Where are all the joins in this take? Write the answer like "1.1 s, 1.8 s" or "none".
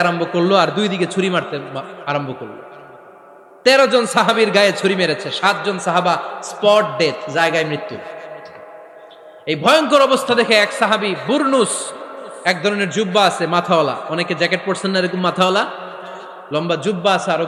none

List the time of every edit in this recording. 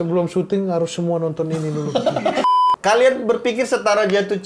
2.4 s

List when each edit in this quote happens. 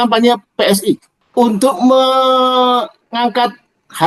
1.1 s

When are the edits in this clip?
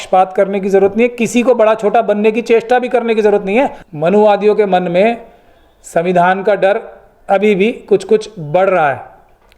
3.8 s

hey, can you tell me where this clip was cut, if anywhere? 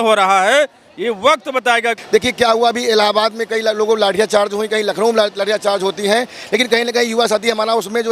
2.0 s

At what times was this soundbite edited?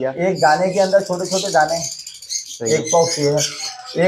none

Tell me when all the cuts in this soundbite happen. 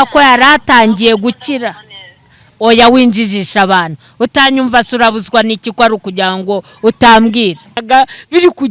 7.8 s

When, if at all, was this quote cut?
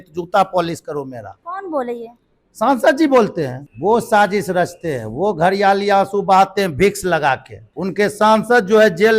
3.6 s, 7.6 s

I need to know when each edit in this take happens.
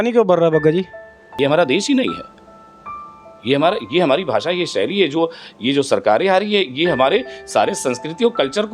1.3 s

